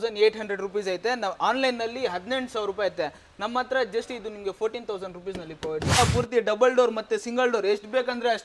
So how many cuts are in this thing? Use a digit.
1